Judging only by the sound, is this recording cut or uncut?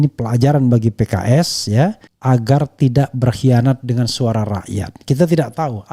uncut